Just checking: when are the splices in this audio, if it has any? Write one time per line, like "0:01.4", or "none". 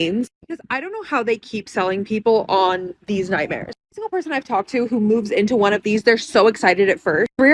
none